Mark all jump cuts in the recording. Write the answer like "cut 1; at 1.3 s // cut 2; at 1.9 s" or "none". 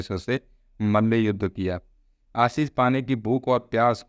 none